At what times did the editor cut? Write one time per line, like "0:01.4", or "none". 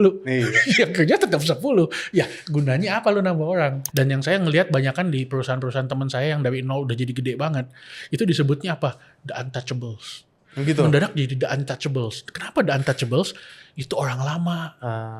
0:03.8